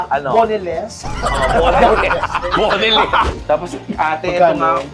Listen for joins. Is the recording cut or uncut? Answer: cut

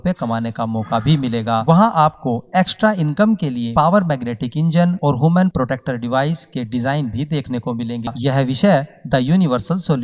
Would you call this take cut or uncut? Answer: cut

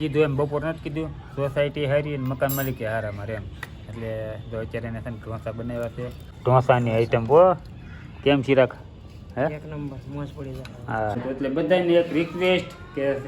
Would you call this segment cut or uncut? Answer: cut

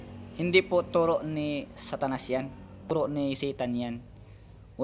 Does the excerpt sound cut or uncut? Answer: cut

